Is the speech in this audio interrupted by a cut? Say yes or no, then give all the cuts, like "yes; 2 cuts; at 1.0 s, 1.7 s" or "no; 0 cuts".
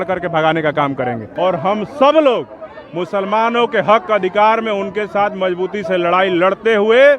yes; 1 cut; at 1.2 s